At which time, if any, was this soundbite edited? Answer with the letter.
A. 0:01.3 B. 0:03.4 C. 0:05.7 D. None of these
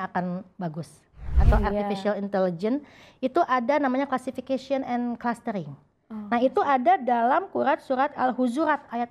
A